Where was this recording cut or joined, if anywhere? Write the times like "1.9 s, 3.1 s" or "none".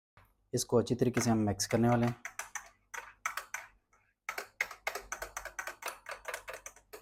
none